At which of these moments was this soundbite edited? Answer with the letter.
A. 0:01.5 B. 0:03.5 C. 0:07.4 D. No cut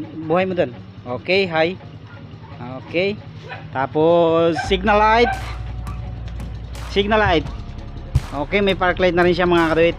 D